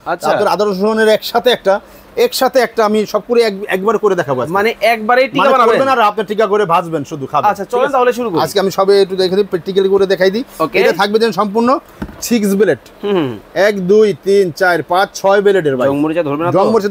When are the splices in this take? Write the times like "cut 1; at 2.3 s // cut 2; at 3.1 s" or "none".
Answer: none